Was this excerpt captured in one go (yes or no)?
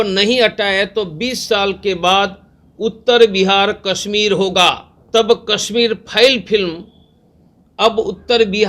no